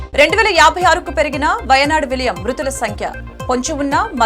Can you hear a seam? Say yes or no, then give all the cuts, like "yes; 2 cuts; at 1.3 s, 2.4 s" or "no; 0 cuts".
no; 0 cuts